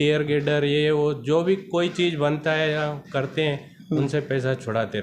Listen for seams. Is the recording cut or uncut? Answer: uncut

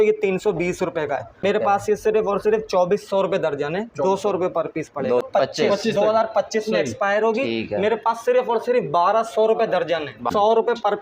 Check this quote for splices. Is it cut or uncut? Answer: cut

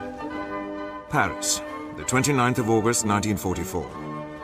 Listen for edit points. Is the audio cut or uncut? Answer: uncut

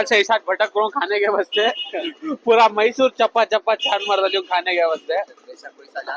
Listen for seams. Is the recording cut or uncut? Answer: uncut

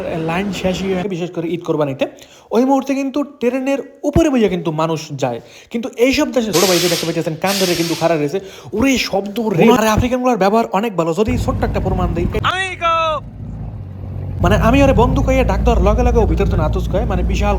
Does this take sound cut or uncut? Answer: cut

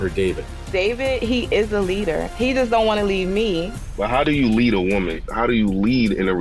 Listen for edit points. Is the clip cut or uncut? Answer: uncut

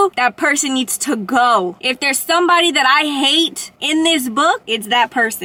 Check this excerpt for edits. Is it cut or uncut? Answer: uncut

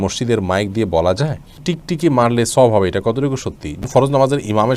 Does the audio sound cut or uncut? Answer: cut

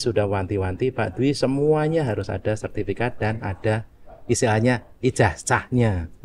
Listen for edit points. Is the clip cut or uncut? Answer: uncut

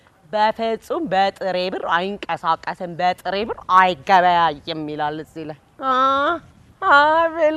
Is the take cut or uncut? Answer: uncut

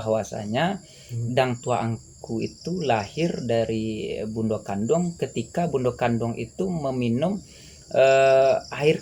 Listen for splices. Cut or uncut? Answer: uncut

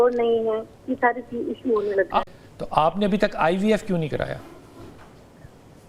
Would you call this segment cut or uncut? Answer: cut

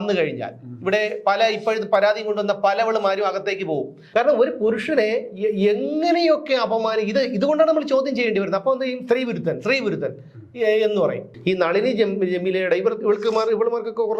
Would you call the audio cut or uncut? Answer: cut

